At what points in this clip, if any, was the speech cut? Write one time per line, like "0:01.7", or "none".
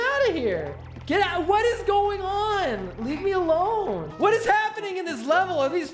0:04.1

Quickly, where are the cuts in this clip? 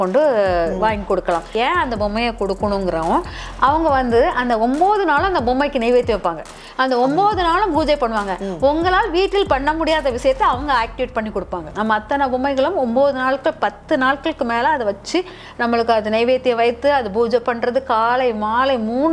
0:01.5
0:11.7

